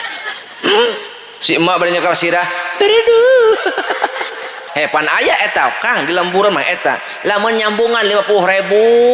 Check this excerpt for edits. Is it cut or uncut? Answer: cut